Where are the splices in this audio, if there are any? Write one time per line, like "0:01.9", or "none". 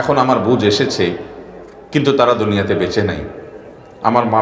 none

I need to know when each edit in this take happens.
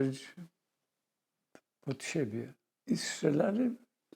0:02.6

